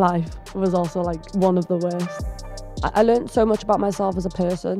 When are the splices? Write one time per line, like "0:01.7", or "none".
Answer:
none